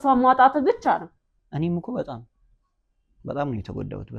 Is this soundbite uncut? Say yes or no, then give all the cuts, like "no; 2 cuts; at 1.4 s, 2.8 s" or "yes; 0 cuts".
no; 1 cut; at 1.4 s